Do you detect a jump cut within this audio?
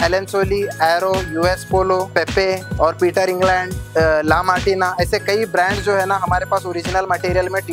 yes; 2 cuts; at 2.4 s, 3.8 s

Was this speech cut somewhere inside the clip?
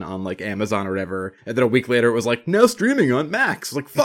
yes; 1 cut; at 1.4 s

